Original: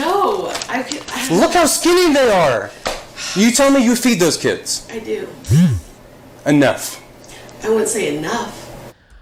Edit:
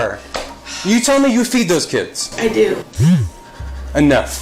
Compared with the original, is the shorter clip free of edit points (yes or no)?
yes